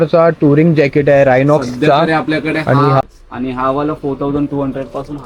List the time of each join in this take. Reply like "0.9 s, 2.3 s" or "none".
3.0 s